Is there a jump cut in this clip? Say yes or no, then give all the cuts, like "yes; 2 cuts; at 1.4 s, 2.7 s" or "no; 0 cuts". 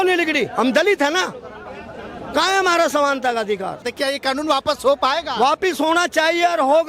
yes; 1 cut; at 3.9 s